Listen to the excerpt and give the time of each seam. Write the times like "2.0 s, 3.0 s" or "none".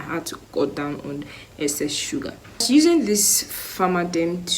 2.6 s